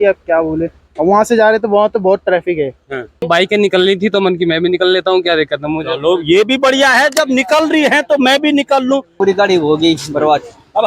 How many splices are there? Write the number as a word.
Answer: two